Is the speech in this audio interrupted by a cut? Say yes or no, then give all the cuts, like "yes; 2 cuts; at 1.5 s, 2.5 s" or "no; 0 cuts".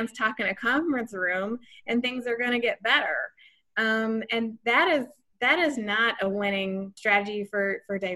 yes; 1 cut; at 6.9 s